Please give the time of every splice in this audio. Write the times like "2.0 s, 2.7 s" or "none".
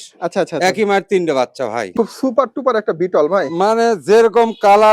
1.8 s